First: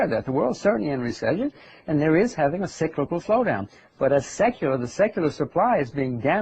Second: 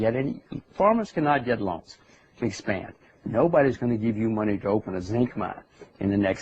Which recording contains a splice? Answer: first; 1 cut; at 3.1 s

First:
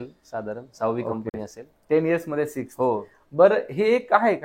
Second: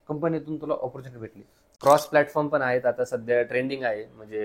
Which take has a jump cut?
second; 1 cut; at 1.8 s

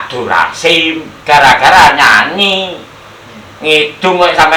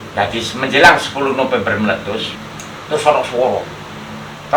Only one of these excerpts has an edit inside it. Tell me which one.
second; 1 cut; at 2.4 s

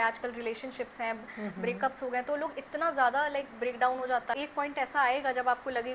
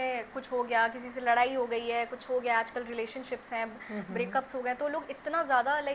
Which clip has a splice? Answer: first; 1 cut; at 4.4 s

